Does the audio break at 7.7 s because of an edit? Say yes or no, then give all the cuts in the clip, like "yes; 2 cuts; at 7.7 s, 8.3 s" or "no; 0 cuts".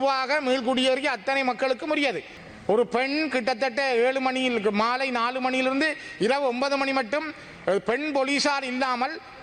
no; 1 cut; at 2.3 s